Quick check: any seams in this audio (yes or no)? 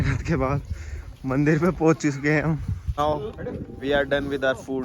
yes